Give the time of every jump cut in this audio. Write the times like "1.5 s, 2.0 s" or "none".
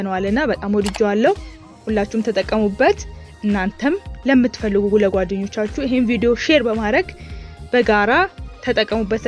none

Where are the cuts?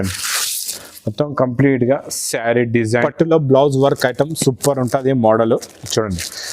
3.0 s

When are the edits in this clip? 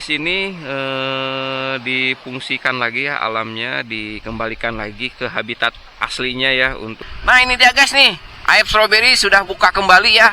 7.0 s

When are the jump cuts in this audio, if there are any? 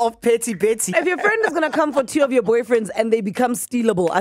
0.9 s

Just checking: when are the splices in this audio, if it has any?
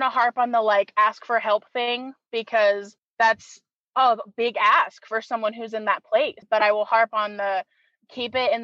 3.0 s, 6.4 s

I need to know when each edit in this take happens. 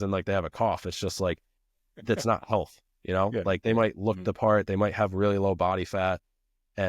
none

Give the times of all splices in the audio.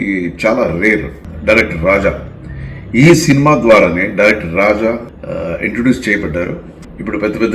none

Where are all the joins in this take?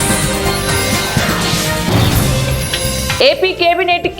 3.1 s

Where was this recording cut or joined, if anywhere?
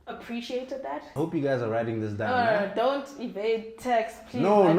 1.1 s

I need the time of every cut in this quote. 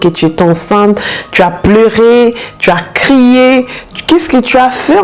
none

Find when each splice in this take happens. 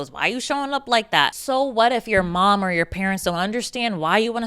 1.4 s

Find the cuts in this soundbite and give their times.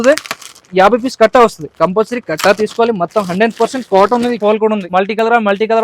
4.5 s

